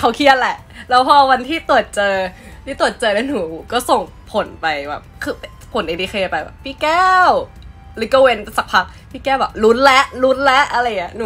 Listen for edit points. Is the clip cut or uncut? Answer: uncut